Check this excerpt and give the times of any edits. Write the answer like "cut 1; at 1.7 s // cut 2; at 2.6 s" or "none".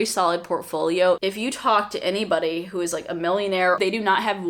cut 1; at 1.2 s // cut 2; at 3.8 s